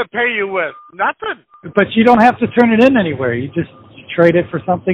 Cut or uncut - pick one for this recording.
cut